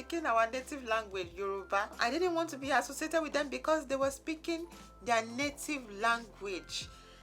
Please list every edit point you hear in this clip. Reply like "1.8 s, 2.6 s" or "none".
1.9 s